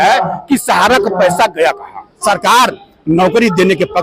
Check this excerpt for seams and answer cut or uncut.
cut